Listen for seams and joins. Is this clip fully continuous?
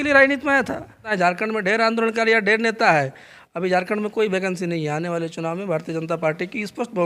no; 1 cut; at 1.1 s

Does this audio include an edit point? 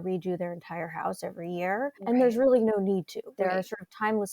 yes; 2 cuts; at 2.0 s, 3.3 s

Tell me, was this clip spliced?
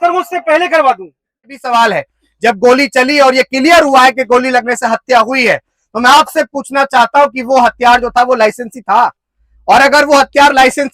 yes; 1 cut; at 1.6 s

